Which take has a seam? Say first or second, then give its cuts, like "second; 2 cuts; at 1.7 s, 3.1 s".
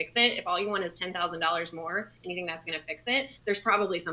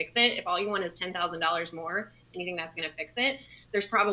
first; 2 cuts; at 2.1 s, 3.3 s